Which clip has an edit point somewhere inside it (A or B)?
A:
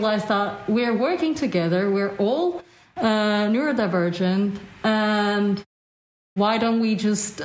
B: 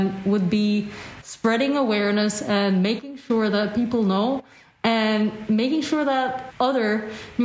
B